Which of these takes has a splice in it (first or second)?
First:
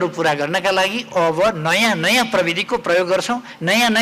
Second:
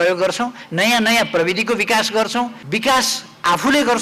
second